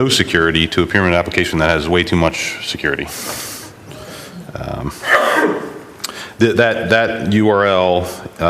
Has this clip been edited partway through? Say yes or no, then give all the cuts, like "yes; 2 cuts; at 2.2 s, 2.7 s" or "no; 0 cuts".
yes; 1 cut; at 4.4 s